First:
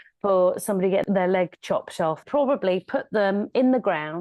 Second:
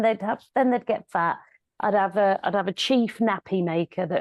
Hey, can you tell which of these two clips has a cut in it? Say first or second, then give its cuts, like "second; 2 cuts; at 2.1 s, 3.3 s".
first; 2 cuts; at 1.0 s, 2.2 s